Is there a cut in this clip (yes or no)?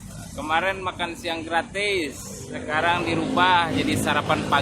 no